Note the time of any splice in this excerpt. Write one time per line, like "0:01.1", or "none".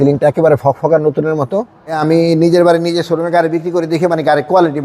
0:01.9